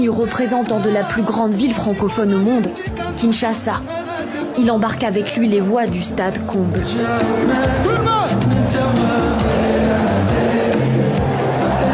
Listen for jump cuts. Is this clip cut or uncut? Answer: uncut